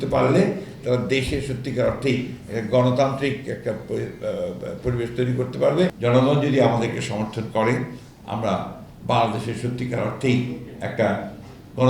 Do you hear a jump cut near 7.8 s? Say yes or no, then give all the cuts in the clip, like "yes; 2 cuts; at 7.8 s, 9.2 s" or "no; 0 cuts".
no; 1 cut; at 5.9 s